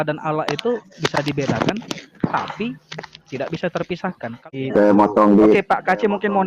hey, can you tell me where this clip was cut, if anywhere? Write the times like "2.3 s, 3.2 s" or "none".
4.5 s